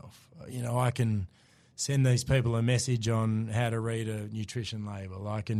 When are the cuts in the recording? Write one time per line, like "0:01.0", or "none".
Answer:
none

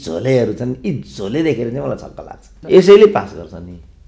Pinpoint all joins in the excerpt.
0:02.5

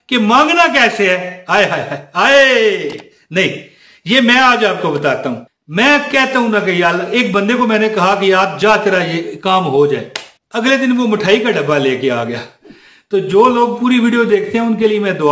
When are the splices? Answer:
0:05.5

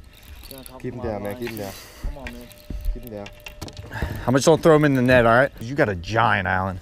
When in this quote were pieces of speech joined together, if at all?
0:05.6

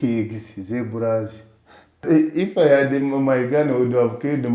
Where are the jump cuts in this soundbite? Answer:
0:02.0

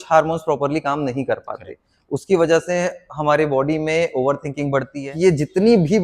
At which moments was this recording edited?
0:05.0

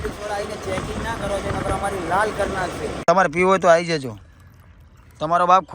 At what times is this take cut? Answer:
0:02.9

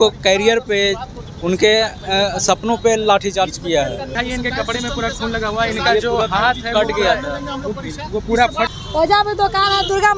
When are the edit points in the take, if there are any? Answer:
0:04.1
0:08.7

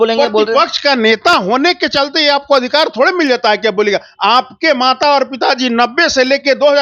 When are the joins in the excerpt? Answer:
none

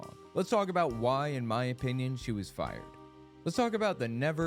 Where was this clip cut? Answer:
0:03.2

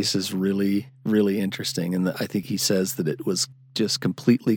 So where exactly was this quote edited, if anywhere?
0:02.5

